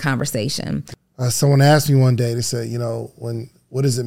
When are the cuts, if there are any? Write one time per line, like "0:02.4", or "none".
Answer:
0:01.0